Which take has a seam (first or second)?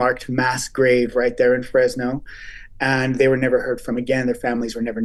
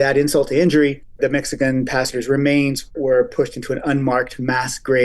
second